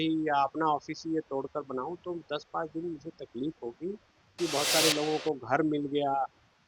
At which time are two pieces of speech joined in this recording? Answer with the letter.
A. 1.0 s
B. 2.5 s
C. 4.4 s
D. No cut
C